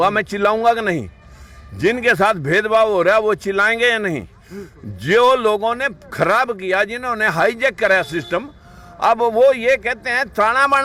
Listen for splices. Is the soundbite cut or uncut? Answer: uncut